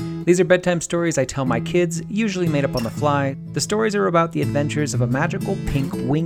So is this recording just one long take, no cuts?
no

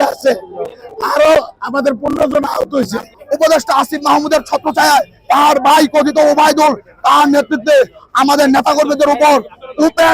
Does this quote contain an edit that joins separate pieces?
yes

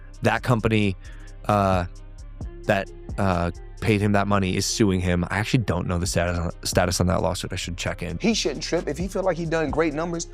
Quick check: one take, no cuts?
no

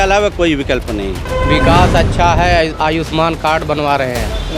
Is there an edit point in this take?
yes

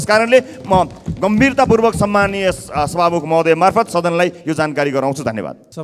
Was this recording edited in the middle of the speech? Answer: no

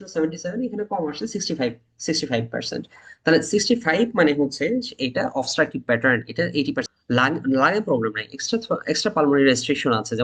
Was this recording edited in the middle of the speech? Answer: yes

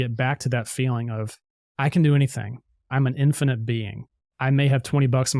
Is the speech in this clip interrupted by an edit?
yes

